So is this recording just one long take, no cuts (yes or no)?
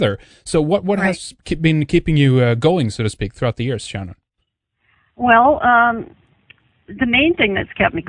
yes